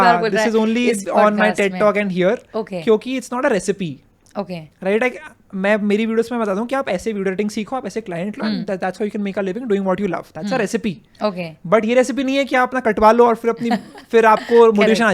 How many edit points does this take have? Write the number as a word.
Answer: zero